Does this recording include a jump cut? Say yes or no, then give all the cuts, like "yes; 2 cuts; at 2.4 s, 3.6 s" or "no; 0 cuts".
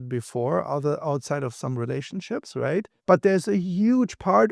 yes; 1 cut; at 2.9 s